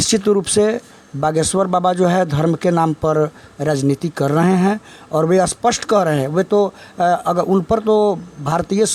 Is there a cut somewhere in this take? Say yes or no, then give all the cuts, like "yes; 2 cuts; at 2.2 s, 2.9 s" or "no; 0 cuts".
no; 0 cuts